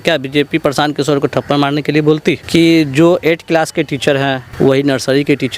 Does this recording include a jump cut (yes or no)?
yes